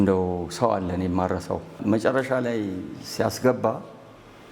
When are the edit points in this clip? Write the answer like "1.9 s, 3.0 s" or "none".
1.8 s